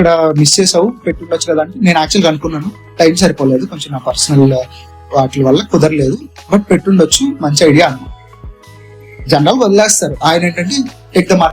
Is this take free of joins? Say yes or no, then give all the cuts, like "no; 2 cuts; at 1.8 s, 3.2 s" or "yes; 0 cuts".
yes; 0 cuts